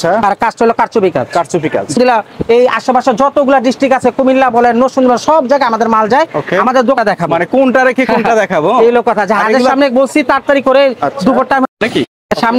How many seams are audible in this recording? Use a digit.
3